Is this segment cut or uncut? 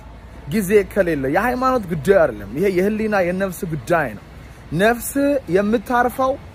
uncut